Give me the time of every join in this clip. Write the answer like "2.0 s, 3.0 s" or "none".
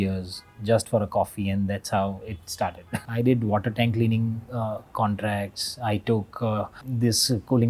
2.9 s, 6.9 s